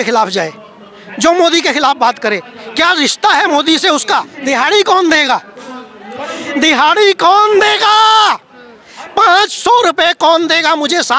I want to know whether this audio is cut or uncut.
cut